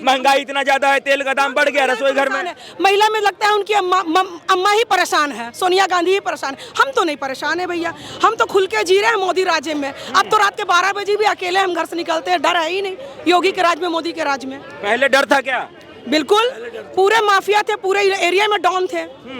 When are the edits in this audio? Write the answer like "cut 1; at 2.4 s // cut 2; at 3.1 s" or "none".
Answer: none